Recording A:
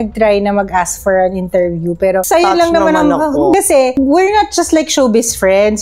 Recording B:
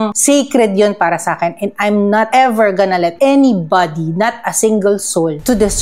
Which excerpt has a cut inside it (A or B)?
A